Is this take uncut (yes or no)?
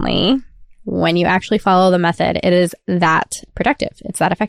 no